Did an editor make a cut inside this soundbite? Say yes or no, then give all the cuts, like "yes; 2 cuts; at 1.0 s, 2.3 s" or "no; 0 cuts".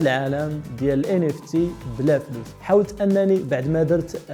no; 0 cuts